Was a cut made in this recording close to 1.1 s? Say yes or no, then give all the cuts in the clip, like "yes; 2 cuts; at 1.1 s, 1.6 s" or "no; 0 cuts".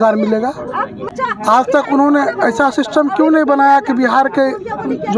yes; 1 cut; at 1.1 s